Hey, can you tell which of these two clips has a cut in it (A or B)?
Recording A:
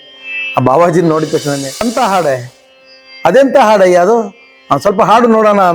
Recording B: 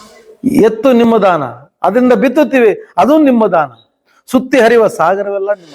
A